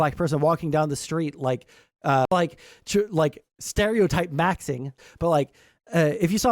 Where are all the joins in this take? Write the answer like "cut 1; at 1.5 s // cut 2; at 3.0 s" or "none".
cut 1; at 2.3 s // cut 2; at 4.9 s